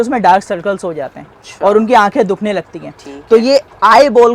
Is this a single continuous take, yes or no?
yes